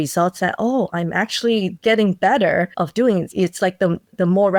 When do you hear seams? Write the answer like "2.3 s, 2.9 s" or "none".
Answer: none